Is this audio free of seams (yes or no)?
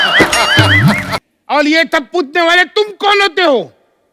no